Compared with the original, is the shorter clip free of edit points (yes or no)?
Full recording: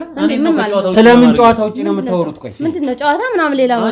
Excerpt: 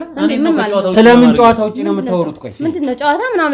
yes